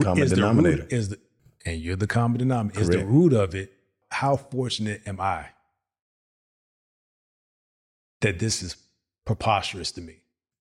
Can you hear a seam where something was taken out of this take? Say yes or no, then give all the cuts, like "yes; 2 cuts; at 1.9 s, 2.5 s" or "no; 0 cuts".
yes; 1 cut; at 4.0 s